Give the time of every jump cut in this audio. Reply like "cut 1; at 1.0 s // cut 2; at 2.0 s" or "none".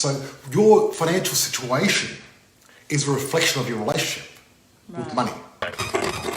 cut 1; at 5.5 s